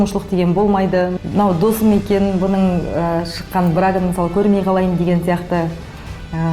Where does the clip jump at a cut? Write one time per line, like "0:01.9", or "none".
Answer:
0:01.2